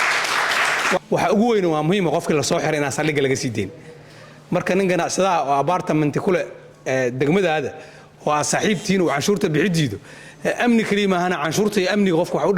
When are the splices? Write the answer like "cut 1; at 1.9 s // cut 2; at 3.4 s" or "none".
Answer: cut 1; at 1.0 s